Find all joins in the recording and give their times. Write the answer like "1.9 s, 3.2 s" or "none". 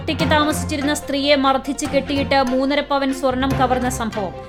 none